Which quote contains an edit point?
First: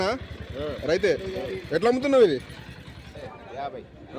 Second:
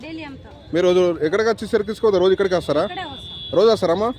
first; 1 cut; at 3.2 s

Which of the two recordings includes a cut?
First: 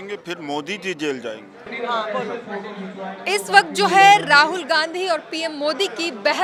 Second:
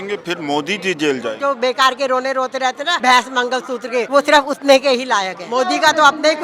second; 4 cuts; at 1.4 s, 2.9 s, 4.1 s, 5.4 s

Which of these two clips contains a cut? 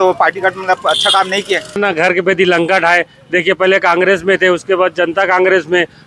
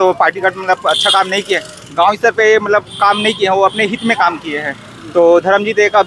first; 1 cut; at 1.8 s

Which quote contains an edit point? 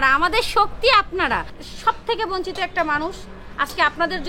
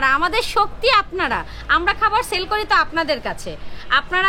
first; 1 cut; at 1.6 s

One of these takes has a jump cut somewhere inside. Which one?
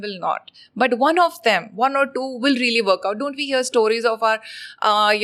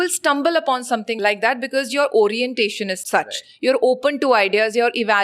second; 2 cuts; at 1.2 s, 3.0 s

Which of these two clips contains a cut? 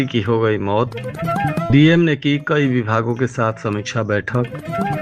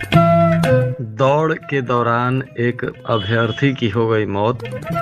second; 1 cut; at 1.0 s

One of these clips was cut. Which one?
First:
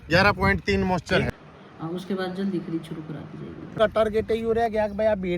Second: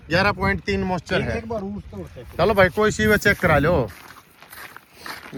first; 2 cuts; at 1.3 s, 3.8 s

